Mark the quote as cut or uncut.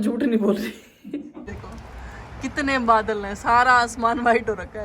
cut